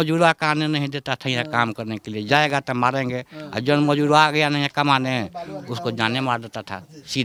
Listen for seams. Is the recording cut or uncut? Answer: uncut